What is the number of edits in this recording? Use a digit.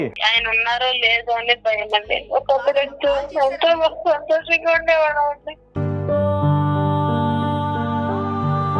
1